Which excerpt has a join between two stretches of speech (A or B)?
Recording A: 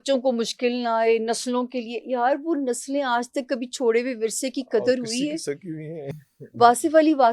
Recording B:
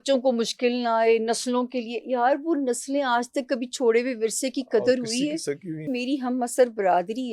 B